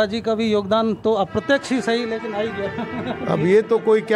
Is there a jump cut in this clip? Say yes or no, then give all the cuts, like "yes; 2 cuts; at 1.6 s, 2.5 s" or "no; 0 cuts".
no; 0 cuts